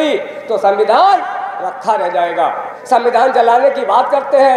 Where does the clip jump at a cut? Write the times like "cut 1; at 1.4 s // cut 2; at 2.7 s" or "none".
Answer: cut 1; at 2.7 s